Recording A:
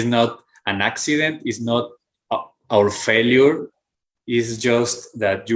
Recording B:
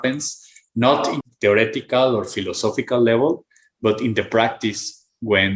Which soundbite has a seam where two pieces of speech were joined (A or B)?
B